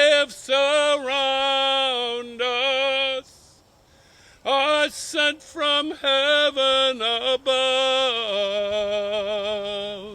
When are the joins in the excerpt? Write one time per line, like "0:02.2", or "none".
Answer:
none